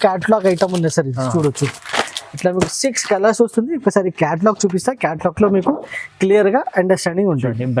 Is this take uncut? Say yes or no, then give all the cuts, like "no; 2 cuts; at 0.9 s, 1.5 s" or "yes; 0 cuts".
yes; 0 cuts